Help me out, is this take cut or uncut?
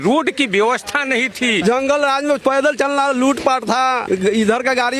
cut